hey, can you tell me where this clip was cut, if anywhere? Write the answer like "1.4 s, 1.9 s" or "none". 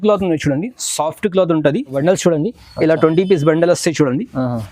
1.9 s